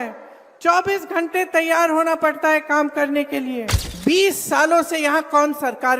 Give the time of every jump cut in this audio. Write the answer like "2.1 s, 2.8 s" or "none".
3.8 s